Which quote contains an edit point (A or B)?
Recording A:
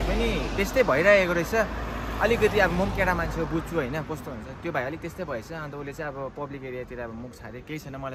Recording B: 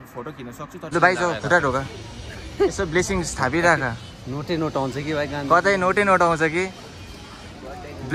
B